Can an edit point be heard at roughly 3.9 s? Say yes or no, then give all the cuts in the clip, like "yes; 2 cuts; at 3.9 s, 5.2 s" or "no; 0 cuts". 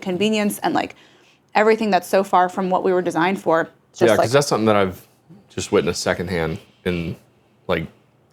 yes; 1 cut; at 3.9 s